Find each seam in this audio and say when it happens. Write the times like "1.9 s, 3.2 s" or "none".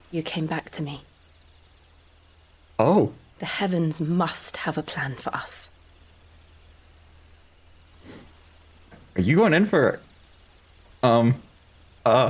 none